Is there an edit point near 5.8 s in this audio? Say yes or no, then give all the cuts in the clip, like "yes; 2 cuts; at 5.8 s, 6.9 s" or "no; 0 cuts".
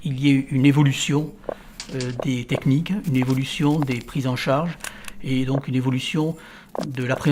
no; 0 cuts